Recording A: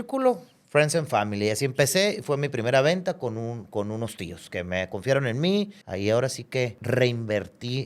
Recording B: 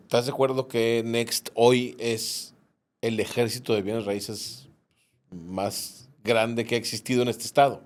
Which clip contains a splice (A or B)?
A